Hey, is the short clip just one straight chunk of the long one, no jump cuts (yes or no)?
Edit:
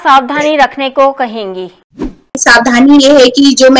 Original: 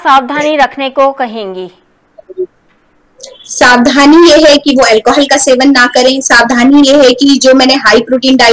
no